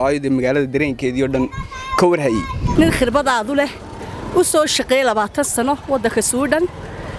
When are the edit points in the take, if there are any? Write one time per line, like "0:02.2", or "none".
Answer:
0:02.6